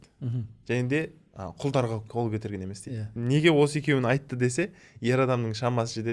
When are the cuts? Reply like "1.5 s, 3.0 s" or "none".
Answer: 2.1 s, 3.1 s